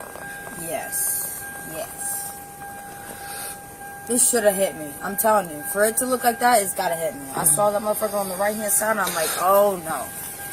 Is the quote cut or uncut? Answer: uncut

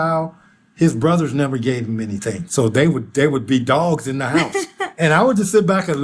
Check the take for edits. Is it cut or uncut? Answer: uncut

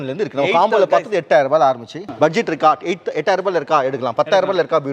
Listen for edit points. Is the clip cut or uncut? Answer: cut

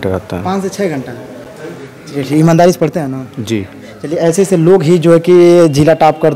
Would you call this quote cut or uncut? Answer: uncut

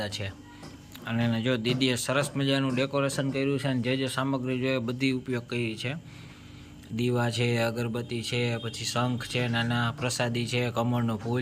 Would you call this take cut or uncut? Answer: uncut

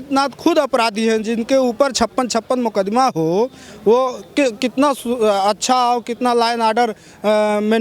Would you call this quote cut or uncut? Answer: uncut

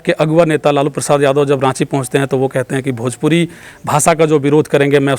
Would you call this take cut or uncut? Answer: uncut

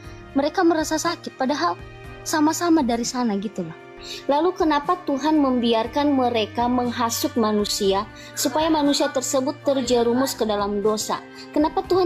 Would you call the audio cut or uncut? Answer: cut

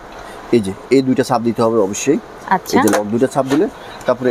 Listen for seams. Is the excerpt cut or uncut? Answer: uncut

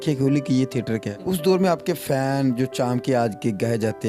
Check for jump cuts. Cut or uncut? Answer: cut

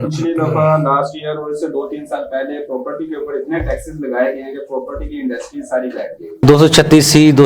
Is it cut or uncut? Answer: uncut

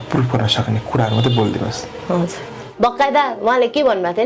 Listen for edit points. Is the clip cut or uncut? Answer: cut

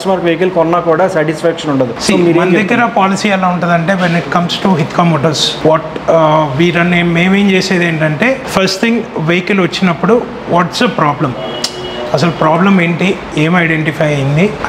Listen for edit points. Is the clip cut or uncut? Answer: uncut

